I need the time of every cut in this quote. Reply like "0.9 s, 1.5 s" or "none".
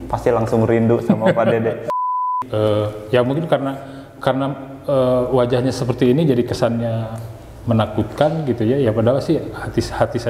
2.2 s